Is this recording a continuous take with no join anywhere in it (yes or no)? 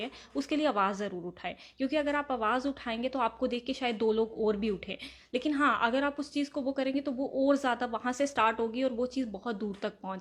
yes